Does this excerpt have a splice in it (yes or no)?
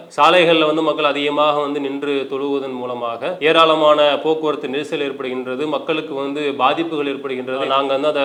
no